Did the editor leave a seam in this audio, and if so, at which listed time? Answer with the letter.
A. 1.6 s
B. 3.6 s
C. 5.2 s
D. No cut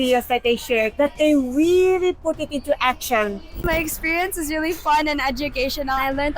B